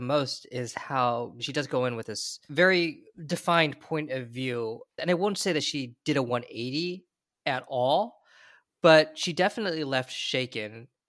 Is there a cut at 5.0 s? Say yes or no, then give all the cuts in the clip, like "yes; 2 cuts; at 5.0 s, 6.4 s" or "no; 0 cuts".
yes; 3 cuts; at 1.4 s, 2.5 s, 5.0 s